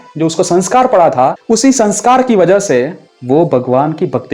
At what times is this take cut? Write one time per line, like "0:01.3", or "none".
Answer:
0:01.4
0:03.1